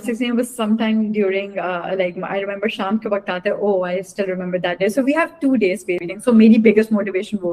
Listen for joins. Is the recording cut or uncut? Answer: cut